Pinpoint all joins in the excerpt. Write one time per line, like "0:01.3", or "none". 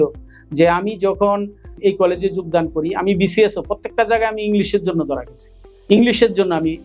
none